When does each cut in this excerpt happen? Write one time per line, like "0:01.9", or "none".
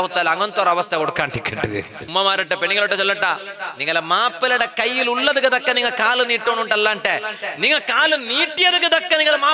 0:02.1